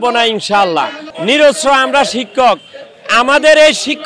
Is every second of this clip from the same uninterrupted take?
no; 1 cut; at 1.0 s

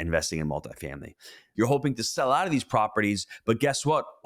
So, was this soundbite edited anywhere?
yes; 1 cut; at 1.4 s

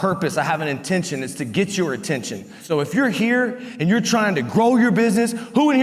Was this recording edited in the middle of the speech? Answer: yes; 1 cut; at 2.6 s

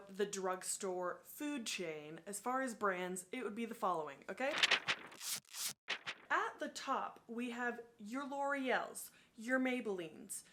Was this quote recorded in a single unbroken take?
yes; 0 cuts

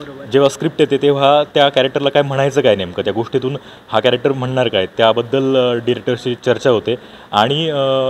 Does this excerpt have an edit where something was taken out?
no; 0 cuts

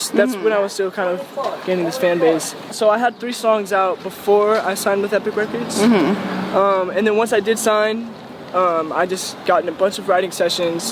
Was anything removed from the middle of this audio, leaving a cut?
yes; 1 cut; at 2.7 s

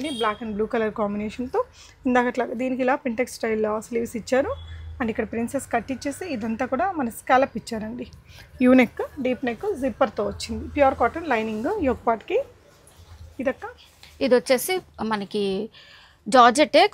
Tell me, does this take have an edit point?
no; 0 cuts

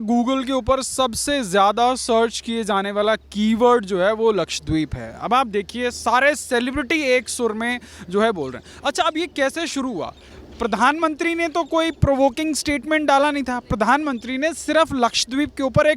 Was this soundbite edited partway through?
no; 0 cuts

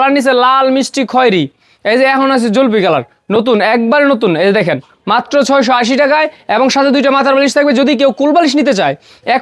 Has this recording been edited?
no; 0 cuts

